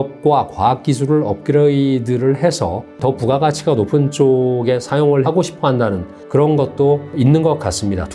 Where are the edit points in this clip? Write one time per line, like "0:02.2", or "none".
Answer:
0:03.0
0:05.2
0:06.1
0:07.1